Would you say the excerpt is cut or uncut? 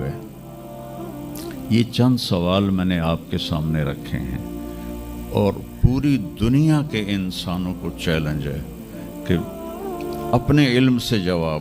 uncut